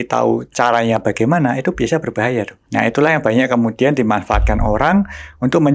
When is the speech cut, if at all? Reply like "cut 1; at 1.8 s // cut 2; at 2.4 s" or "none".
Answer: cut 1; at 2.6 s